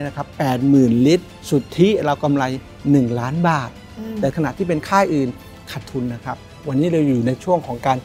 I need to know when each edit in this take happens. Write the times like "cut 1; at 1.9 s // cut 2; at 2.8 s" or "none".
cut 1; at 1.4 s // cut 2; at 4.3 s // cut 3; at 6.5 s